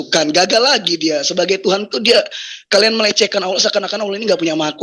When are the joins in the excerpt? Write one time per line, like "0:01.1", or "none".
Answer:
none